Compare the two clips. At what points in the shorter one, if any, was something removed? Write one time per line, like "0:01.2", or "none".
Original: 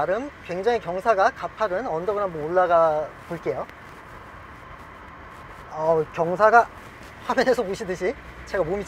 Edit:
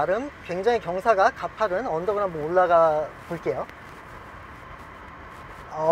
none